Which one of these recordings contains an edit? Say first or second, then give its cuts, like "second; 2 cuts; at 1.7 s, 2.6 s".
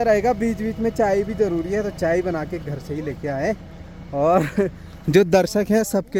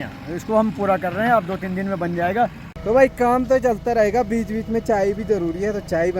second; 1 cut; at 2.7 s